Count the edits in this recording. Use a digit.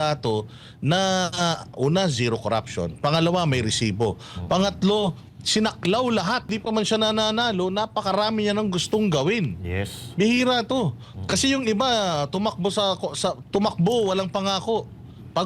1